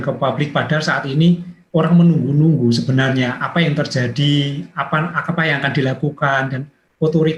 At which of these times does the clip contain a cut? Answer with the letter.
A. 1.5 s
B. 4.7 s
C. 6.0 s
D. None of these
A